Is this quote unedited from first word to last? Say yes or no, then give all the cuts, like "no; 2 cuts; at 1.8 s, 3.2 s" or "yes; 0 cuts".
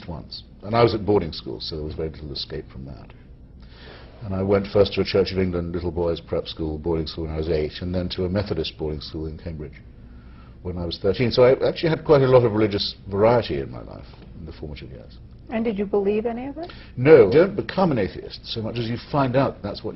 no; 1 cut; at 17.3 s